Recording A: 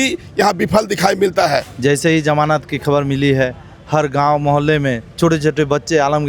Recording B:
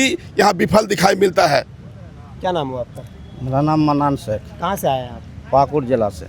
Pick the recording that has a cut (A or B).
A